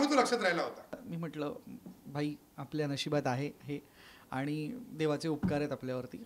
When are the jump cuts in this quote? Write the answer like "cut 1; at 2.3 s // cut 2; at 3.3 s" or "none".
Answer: cut 1; at 1.1 s